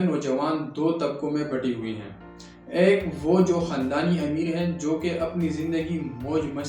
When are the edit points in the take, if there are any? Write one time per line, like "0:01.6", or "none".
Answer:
none

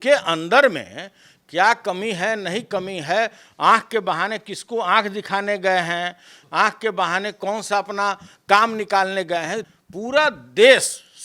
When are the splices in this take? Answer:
0:09.6

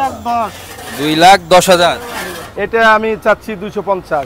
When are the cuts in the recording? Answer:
0:02.5

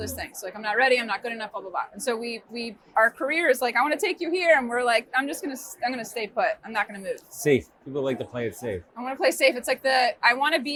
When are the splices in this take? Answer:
none

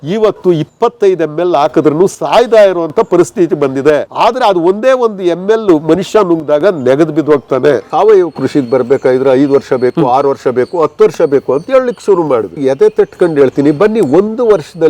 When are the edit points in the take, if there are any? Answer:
0:04.1
0:07.9
0:12.6

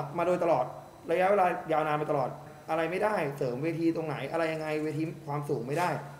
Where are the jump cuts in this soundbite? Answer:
0:02.5

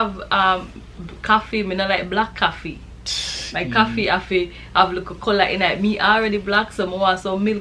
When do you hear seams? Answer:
none

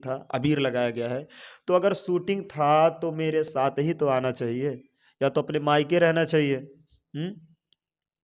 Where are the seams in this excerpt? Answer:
none

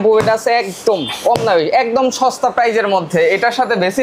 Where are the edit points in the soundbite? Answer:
none

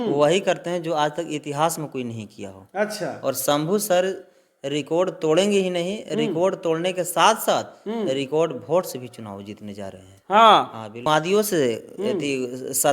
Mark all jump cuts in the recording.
0:11.0

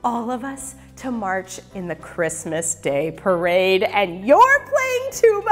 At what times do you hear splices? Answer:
none

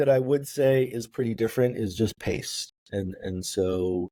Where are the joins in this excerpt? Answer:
none

